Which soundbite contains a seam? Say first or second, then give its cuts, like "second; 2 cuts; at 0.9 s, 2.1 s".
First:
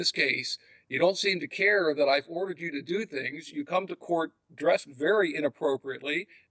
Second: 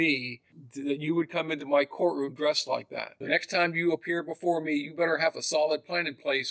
second; 1 cut; at 3.2 s